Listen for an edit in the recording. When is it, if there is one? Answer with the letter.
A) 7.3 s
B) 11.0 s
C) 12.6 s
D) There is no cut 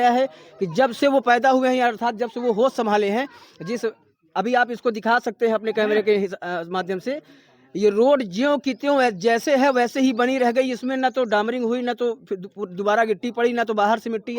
D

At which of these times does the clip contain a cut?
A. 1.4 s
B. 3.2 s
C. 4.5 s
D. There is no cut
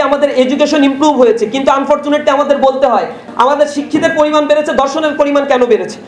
B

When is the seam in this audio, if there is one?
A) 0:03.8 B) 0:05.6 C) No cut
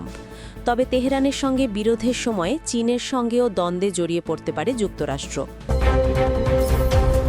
B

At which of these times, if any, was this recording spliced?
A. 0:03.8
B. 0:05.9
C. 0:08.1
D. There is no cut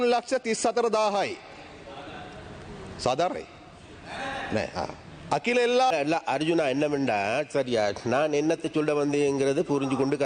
B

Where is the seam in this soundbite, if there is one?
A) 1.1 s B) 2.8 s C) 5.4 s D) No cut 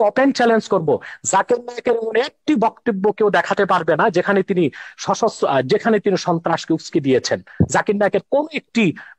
D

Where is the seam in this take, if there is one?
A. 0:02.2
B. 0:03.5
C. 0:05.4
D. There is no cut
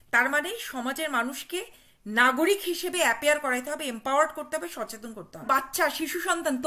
C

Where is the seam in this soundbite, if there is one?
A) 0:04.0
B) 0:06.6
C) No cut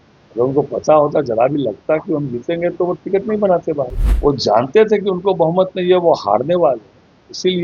A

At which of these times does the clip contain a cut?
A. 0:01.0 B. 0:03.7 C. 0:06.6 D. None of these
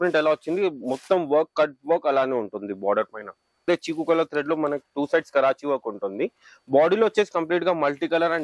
B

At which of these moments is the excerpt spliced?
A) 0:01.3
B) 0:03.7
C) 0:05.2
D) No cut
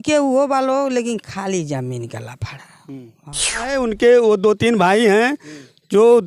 B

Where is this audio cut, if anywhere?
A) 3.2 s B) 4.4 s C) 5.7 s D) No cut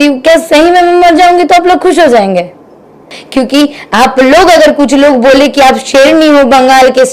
A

